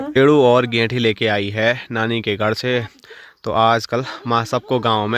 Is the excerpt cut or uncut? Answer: uncut